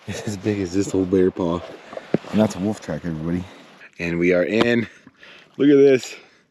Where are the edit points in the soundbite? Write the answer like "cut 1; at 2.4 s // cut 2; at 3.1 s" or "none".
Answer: cut 1; at 3.8 s